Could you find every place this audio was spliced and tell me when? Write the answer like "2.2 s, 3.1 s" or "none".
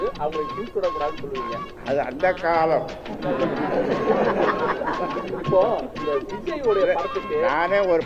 none